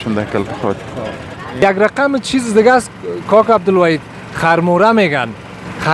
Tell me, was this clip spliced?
yes; 1 cut; at 1.6 s

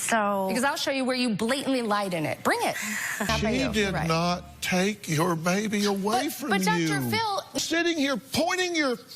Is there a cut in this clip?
yes; 2 cuts; at 3.3 s, 7.6 s

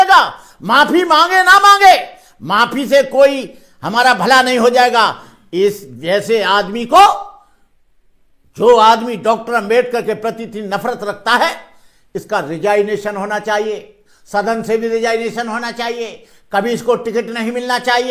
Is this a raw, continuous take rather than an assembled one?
yes; 0 cuts

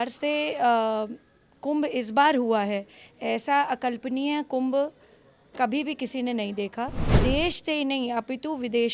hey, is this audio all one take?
no; 1 cut; at 7.0 s

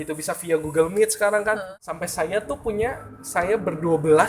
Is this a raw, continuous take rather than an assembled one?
no; 1 cut; at 1.8 s

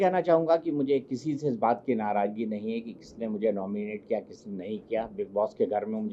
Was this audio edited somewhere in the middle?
no; 0 cuts

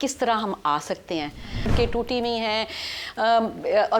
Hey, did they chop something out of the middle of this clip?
yes; 1 cut; at 1.7 s

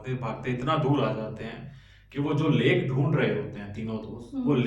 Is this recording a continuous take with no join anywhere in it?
yes; 0 cuts

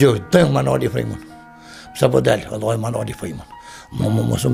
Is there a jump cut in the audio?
no; 0 cuts

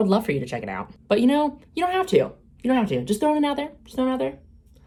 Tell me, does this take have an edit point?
no; 0 cuts

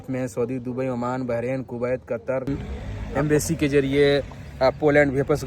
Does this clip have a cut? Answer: yes; 1 cut; at 2.5 s

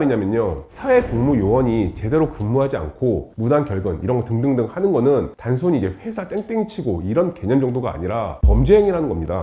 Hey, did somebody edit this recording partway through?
no; 0 cuts

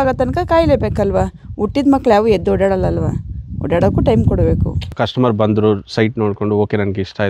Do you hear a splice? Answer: yes; 1 cut; at 5.0 s

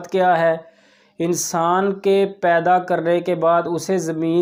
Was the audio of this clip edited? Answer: no; 0 cuts

